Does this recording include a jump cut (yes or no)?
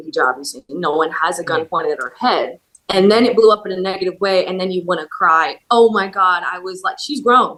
no